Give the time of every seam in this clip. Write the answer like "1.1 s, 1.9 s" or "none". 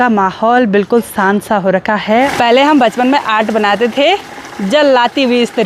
2.3 s